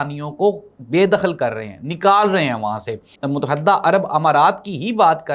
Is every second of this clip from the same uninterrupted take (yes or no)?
no